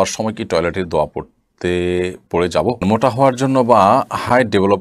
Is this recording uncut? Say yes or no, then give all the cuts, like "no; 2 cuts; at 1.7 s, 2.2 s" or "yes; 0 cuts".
no; 1 cut; at 2.8 s